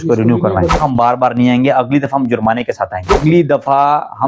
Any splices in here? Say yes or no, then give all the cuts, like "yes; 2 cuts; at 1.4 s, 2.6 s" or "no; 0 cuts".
yes; 2 cuts; at 0.8 s, 3.2 s